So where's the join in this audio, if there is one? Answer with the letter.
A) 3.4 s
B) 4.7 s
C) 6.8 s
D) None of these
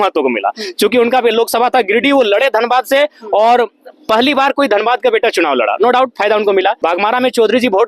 C